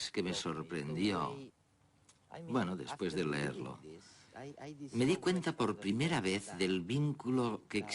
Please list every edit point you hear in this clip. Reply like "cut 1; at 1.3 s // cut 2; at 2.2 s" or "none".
cut 1; at 5.6 s

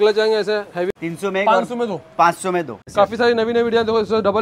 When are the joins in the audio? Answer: cut 1; at 0.9 s // cut 2; at 2.8 s

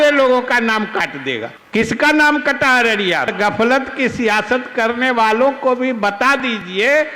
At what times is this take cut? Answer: cut 1; at 1.5 s // cut 2; at 3.3 s

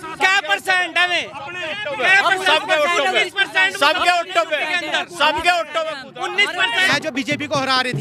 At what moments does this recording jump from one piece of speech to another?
cut 1; at 6.8 s

